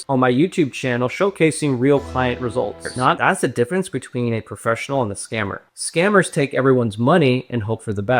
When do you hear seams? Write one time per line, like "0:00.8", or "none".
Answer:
0:03.2